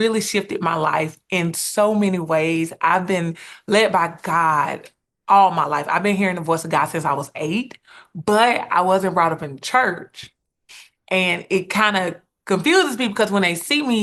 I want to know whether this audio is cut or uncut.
uncut